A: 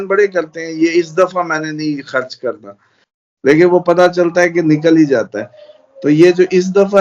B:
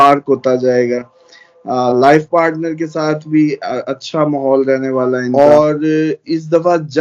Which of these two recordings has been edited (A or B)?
B